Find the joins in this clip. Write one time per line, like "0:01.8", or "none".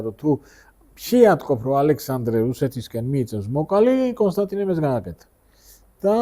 none